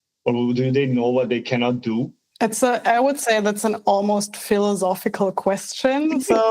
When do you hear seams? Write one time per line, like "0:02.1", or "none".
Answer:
0:02.2